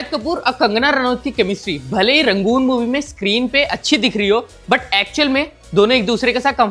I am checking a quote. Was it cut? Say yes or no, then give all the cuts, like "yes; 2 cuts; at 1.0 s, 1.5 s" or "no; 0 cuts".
no; 0 cuts